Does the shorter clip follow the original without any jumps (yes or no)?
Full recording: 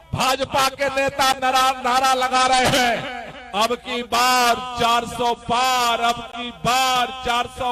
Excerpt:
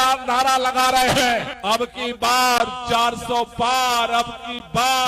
no